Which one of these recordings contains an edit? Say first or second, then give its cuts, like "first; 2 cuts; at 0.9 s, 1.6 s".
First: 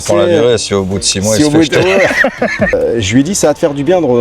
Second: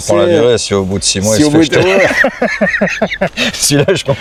first; 1 cut; at 2.7 s